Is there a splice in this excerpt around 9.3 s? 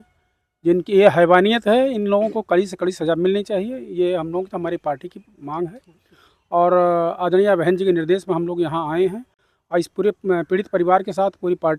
no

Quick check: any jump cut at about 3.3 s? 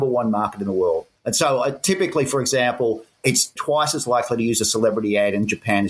yes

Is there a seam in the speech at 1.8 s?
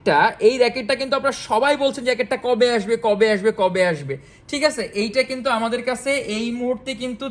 no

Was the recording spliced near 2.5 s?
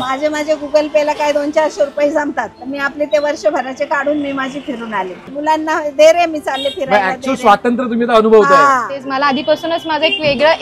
yes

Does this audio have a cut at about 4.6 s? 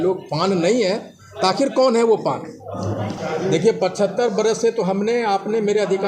no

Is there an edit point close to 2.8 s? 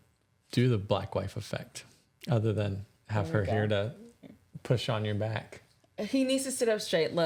no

